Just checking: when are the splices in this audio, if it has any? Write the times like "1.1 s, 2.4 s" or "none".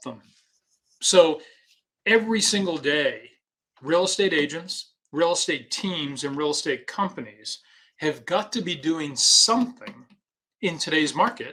none